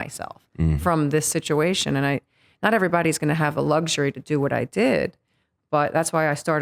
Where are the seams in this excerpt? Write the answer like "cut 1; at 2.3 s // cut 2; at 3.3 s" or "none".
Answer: none